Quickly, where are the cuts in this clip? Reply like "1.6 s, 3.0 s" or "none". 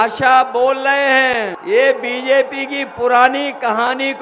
1.5 s

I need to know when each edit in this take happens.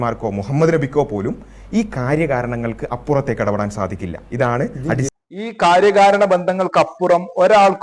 none

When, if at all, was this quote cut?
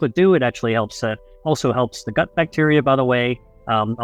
none

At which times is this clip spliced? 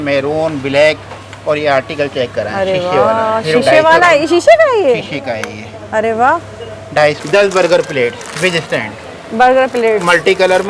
7.2 s

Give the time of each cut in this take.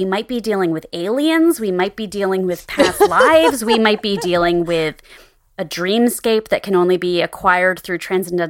none

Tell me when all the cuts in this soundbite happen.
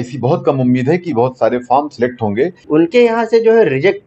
2.6 s

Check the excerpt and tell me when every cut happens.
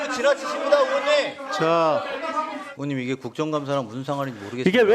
2.6 s

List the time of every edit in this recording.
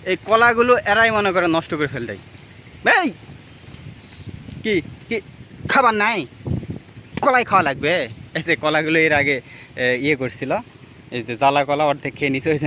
none

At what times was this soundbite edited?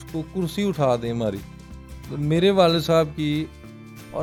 none

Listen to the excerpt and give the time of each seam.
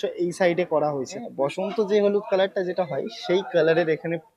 1.3 s

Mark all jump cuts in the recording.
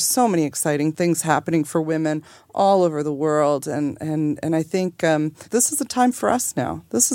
0.9 s, 5.4 s

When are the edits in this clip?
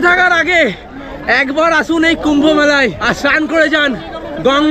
3.0 s

